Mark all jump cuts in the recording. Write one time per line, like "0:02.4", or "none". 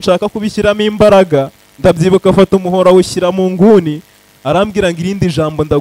none